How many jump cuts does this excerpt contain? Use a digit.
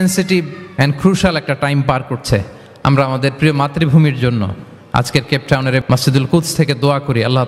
1